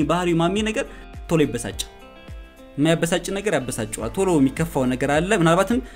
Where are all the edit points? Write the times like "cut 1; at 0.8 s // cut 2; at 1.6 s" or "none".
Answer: cut 1; at 1.1 s